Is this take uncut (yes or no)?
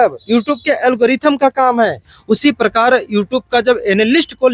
no